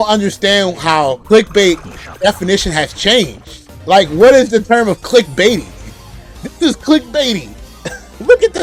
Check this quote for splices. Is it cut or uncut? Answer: uncut